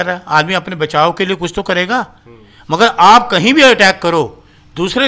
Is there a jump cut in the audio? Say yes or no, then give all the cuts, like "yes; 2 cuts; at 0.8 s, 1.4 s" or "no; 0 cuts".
no; 0 cuts